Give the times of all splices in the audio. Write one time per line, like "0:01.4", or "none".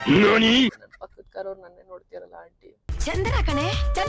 0:00.9
0:02.9